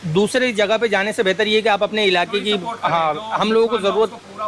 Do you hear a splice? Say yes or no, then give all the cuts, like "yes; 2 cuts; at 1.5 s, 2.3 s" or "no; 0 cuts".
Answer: no; 0 cuts